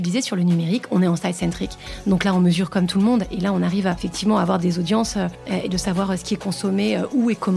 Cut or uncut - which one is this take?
cut